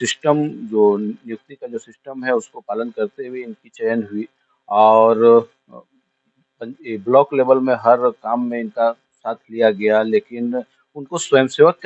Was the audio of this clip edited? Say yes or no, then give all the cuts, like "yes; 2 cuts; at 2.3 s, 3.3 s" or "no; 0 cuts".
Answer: no; 0 cuts